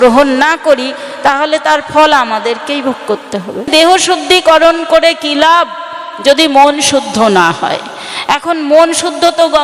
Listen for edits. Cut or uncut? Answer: cut